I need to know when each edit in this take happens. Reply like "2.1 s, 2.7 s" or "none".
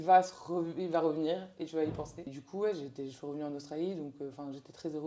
2.4 s